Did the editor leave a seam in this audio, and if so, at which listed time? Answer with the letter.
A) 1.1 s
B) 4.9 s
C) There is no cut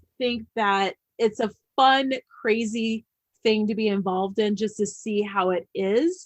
A